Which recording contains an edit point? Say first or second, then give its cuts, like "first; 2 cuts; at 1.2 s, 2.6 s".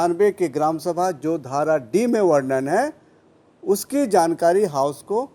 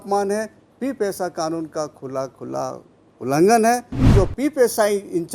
second; 1 cut; at 4.1 s